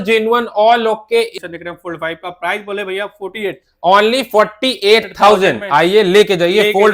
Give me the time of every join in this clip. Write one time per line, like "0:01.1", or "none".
0:01.3